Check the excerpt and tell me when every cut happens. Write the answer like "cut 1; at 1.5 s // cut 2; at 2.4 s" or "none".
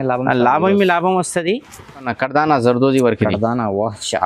cut 1; at 2.1 s